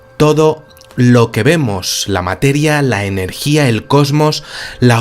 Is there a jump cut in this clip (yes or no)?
yes